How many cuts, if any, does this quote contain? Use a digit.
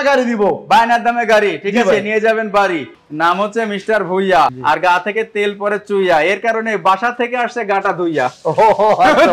1